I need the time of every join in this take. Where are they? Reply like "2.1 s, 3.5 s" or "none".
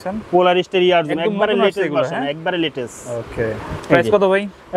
3.7 s